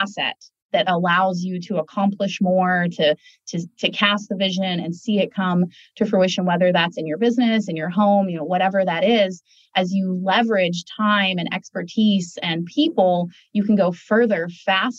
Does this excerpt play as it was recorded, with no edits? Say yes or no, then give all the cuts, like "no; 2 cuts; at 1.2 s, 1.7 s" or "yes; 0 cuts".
yes; 0 cuts